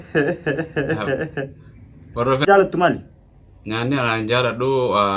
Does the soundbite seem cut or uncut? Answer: cut